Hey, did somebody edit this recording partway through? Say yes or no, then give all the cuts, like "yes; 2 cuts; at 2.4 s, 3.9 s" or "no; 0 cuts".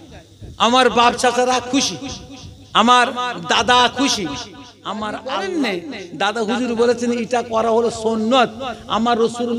yes; 1 cut; at 5.2 s